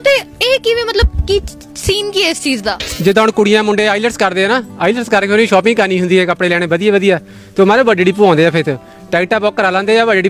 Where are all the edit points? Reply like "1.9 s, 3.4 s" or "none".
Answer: 2.9 s